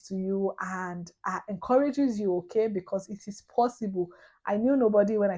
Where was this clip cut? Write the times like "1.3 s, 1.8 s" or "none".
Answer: none